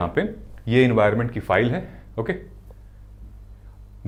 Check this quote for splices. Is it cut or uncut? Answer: uncut